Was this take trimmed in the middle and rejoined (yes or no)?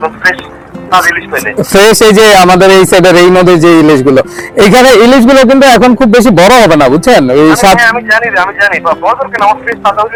no